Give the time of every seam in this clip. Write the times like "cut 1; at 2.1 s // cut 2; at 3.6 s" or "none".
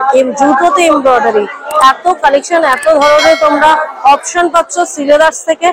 none